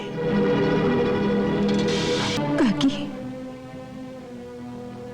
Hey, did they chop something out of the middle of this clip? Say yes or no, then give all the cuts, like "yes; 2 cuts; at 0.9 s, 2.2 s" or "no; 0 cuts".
yes; 1 cut; at 2.4 s